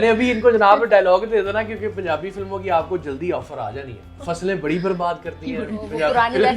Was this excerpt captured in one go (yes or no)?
no